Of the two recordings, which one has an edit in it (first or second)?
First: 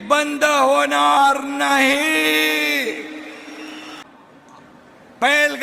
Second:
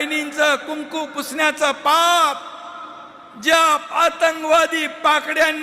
first